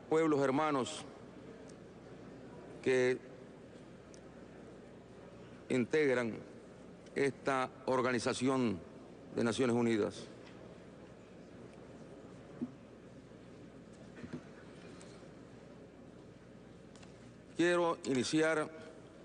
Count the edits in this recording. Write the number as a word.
one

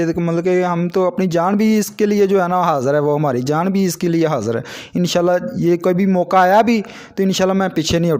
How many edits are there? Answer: zero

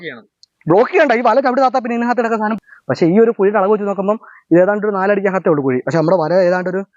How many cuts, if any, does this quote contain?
one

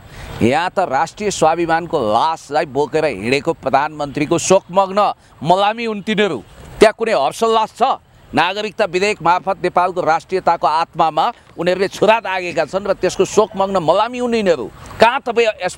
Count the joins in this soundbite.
zero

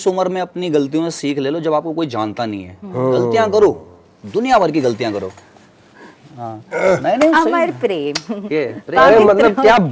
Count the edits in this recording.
zero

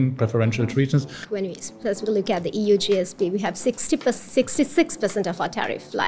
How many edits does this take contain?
one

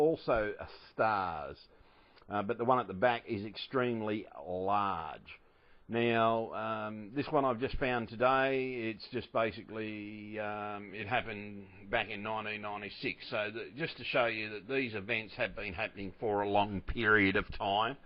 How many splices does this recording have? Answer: one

